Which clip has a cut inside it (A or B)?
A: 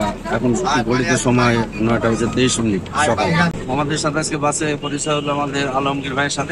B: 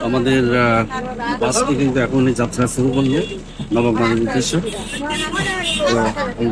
A